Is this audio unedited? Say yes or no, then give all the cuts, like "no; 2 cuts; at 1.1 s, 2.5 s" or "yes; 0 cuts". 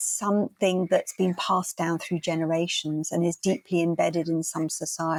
yes; 0 cuts